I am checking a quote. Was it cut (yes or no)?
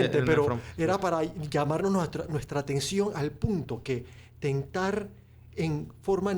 no